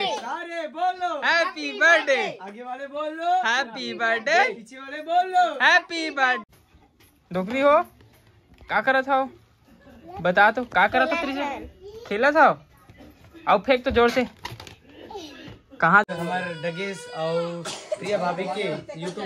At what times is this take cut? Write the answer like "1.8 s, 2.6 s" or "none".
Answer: 6.4 s, 16.0 s